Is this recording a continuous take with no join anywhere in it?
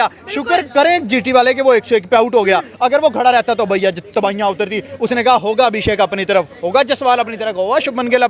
yes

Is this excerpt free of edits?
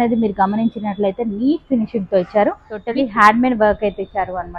no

